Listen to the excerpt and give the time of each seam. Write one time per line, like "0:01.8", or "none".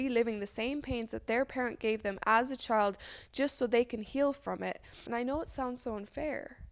0:05.1